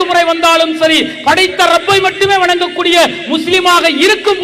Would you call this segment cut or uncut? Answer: uncut